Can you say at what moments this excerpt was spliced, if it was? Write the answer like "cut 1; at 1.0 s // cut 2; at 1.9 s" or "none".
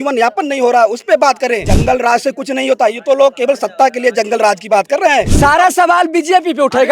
cut 1; at 1.7 s // cut 2; at 5.3 s